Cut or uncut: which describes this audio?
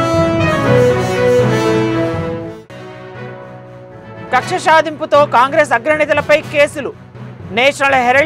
cut